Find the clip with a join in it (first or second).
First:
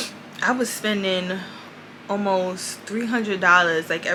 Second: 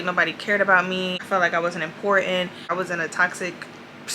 second